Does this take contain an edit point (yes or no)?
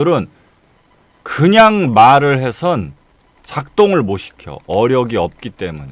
no